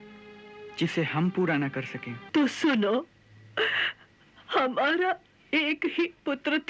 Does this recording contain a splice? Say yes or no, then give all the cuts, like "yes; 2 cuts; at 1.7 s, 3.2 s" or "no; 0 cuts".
yes; 1 cut; at 2.2 s